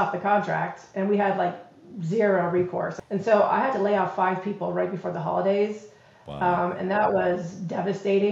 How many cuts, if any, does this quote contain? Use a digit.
1